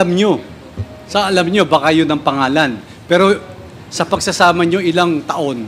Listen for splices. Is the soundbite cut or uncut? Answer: uncut